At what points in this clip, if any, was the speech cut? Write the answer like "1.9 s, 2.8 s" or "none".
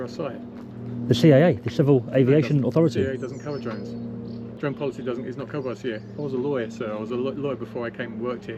4.5 s